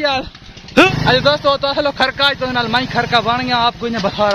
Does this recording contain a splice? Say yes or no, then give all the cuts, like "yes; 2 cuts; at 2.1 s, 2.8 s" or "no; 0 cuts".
yes; 1 cut; at 1.0 s